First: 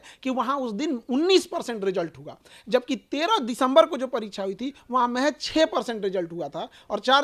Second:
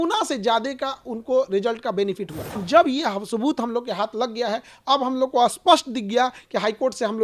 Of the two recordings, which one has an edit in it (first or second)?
second